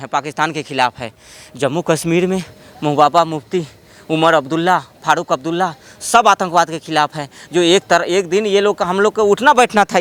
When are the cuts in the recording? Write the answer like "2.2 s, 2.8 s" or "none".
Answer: none